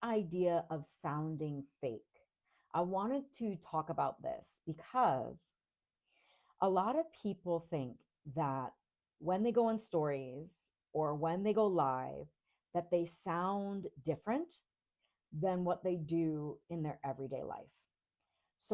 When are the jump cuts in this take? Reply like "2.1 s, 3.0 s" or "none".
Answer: none